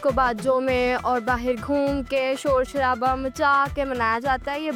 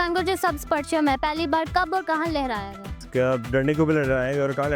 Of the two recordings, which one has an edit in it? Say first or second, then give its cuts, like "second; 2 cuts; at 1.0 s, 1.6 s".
second; 1 cut; at 3.0 s